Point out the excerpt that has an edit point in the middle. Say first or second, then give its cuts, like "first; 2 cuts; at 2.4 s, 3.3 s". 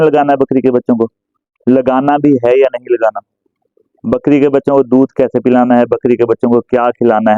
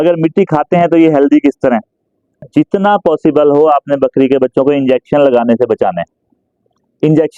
second; 1 cut; at 2.5 s